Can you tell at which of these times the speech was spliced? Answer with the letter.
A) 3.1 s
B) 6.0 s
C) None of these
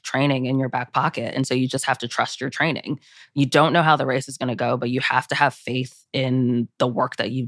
C